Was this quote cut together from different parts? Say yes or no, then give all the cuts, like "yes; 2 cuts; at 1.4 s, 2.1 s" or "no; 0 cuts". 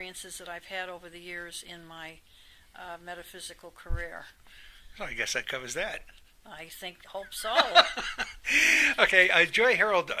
yes; 1 cut; at 1.6 s